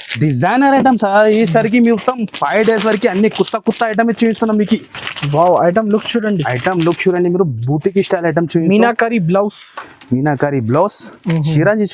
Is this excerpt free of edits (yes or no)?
yes